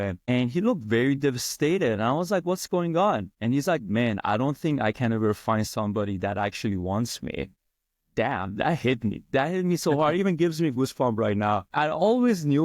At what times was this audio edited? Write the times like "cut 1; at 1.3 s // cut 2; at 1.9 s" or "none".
cut 1; at 8.0 s // cut 2; at 11.7 s